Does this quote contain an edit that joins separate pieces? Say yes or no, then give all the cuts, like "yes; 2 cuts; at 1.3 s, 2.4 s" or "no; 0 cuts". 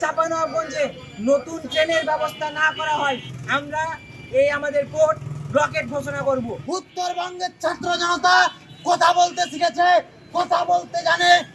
yes; 2 cuts; at 3.3 s, 6.6 s